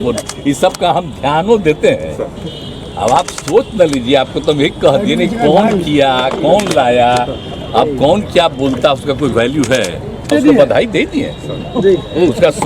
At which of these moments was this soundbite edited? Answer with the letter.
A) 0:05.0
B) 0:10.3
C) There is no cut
B